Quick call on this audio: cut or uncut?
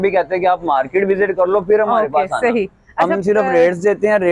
uncut